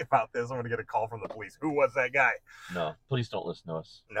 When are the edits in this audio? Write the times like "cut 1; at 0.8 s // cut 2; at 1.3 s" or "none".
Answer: none